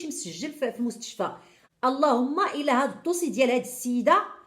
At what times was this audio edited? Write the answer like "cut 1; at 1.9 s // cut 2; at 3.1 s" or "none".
cut 1; at 1.8 s

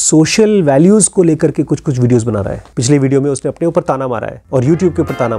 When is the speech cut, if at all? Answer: cut 1; at 2.6 s // cut 2; at 4.3 s

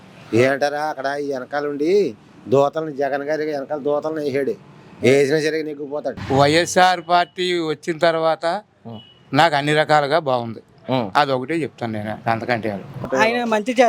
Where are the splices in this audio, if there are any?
cut 1; at 6.2 s // cut 2; at 13.0 s

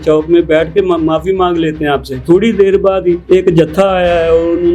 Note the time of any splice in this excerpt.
cut 1; at 2.2 s // cut 2; at 3.2 s

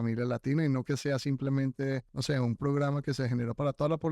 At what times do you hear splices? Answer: cut 1; at 2.1 s

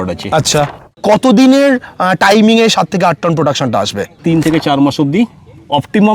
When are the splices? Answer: cut 1; at 0.9 s // cut 2; at 4.2 s

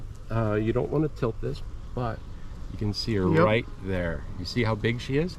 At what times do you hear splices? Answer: cut 1; at 3.6 s

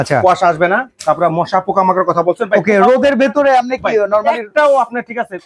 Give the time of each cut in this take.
none

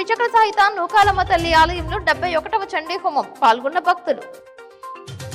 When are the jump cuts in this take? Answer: none

